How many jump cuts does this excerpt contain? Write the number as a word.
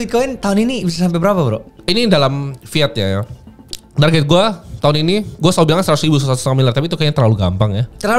one